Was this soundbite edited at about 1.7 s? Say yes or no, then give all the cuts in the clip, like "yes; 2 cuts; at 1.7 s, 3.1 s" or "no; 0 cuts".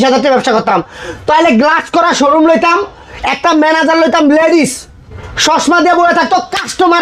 no; 0 cuts